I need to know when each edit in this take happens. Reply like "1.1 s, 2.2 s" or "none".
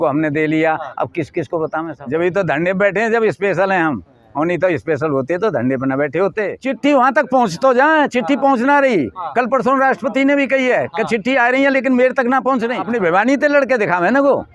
1.9 s, 6.6 s, 12.8 s